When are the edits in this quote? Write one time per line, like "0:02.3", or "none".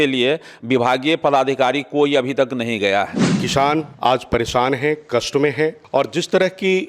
0:03.5
0:05.8

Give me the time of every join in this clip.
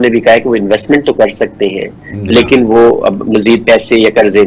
none

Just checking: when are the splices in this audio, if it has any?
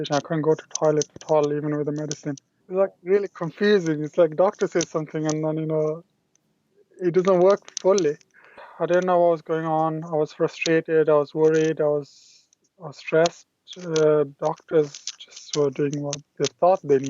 0:02.5
0:08.6

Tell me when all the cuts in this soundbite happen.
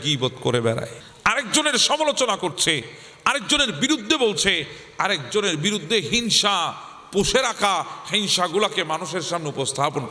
0:01.0

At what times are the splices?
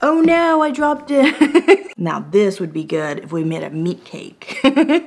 0:01.9

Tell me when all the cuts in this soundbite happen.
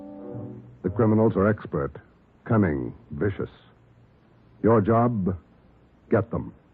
0:04.8

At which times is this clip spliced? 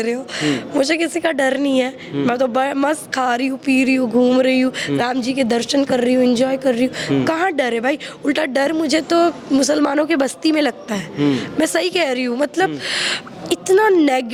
none

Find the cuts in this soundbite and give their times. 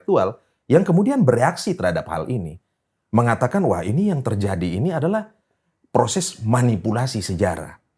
none

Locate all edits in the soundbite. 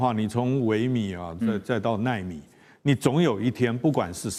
none

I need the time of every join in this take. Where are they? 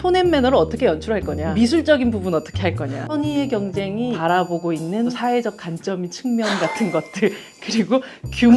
0:01.4
0:03.0
0:04.2
0:05.2

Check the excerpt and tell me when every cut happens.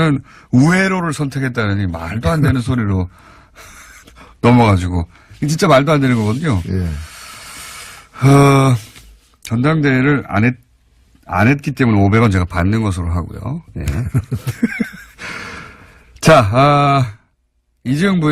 0:07.3

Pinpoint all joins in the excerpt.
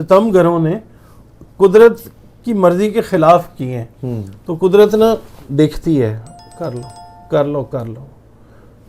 none

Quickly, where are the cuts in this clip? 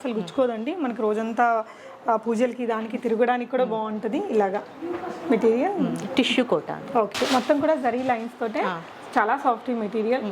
0:07.2

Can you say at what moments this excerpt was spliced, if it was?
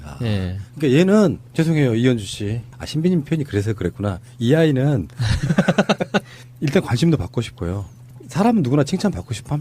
none

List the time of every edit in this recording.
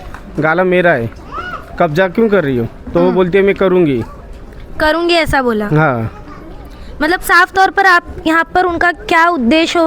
none

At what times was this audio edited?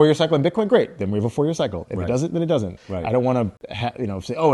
0:02.8
0:03.6

